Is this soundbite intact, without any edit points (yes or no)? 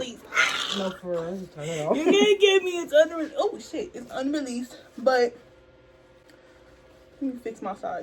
yes